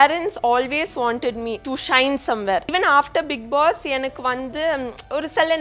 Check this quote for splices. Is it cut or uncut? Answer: cut